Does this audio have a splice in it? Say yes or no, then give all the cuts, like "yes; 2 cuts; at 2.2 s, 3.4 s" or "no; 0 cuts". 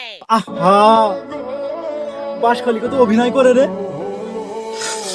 no; 0 cuts